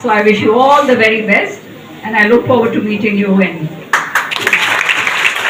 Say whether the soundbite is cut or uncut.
uncut